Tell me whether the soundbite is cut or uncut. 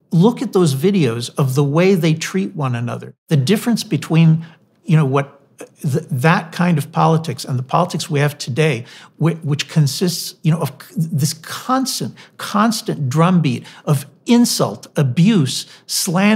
cut